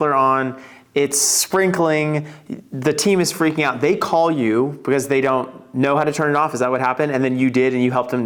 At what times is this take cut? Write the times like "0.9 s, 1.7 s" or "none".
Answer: none